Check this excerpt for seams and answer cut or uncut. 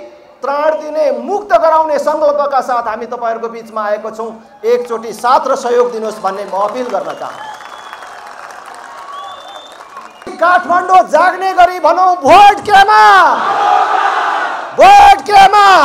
cut